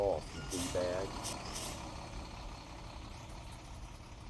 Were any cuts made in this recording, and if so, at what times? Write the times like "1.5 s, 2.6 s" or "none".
none